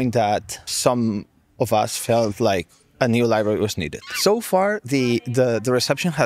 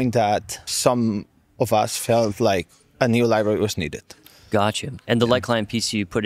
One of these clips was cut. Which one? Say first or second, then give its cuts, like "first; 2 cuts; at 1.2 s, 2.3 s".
first; 1 cut; at 4.1 s